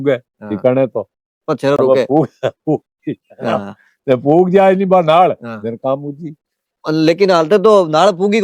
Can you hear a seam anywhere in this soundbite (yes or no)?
no